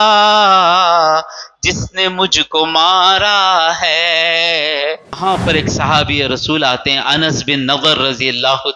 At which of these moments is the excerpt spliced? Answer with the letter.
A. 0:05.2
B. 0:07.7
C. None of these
A